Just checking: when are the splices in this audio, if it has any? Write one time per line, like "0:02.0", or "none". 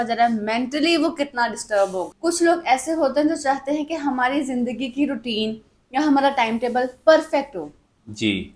0:02.1